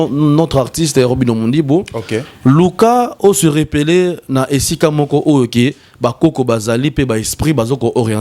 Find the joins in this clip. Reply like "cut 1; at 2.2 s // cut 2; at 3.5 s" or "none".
none

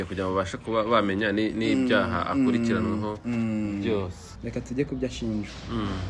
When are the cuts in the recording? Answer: cut 1; at 4.2 s

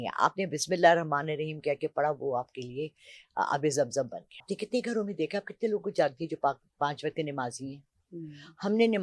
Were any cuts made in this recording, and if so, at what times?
cut 1; at 4.5 s

